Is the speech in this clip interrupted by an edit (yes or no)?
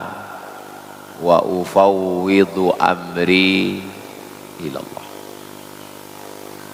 no